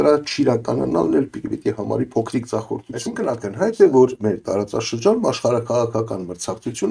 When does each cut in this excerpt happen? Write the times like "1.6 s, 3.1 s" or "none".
3.0 s